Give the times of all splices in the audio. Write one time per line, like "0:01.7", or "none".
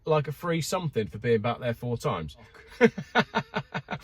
0:02.5